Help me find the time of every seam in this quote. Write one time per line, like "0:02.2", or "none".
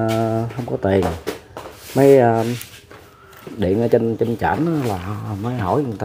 none